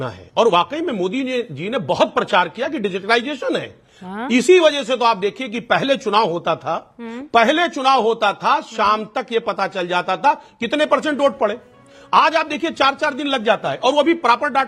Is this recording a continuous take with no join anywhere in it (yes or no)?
yes